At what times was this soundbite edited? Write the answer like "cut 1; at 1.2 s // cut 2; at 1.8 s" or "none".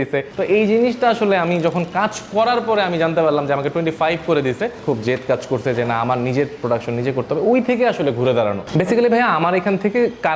none